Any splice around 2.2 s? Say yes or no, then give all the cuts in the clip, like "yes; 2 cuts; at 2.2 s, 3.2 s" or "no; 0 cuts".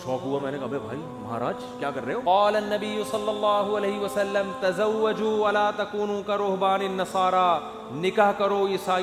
yes; 1 cut; at 2.2 s